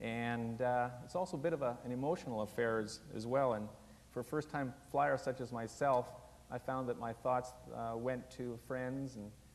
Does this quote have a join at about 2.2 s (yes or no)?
yes